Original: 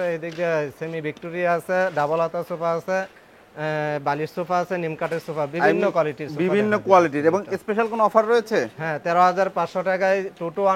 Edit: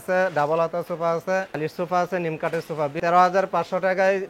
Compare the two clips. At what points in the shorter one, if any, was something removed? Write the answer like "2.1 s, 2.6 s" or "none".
1.6 s, 3.0 s